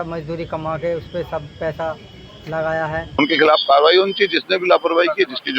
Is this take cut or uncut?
cut